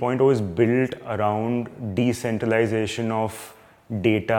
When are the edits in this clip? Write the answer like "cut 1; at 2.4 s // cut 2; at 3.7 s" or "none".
none